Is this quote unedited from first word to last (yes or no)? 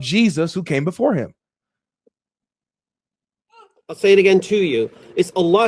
yes